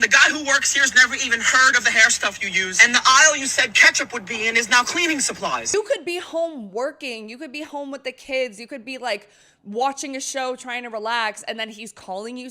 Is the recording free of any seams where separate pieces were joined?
no; 1 cut; at 5.7 s

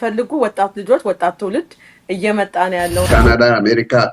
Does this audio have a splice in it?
yes; 1 cut; at 3.1 s

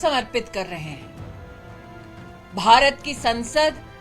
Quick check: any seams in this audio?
no; 0 cuts

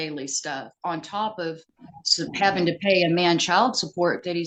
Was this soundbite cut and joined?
no; 0 cuts

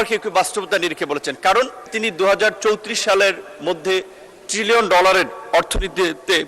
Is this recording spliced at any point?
yes; 1 cut; at 1.9 s

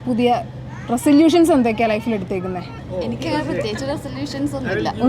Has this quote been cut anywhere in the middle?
yes; 1 cut; at 2.8 s

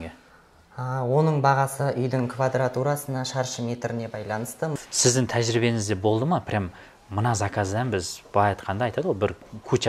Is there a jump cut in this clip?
yes; 1 cut; at 4.8 s

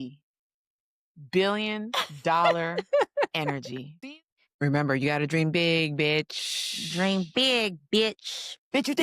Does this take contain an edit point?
yes; 1 cut; at 4.0 s

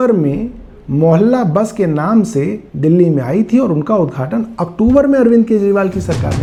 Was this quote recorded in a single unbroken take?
yes; 0 cuts

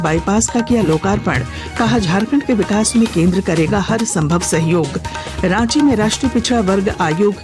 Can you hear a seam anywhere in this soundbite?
no; 0 cuts

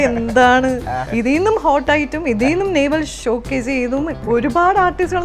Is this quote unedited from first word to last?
no; 3 cuts; at 1.0 s, 3.1 s, 4.2 s

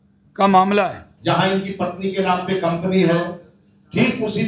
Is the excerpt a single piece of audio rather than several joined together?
no; 1 cut; at 1.1 s

